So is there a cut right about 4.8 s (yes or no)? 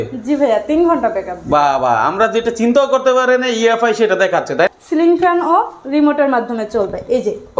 yes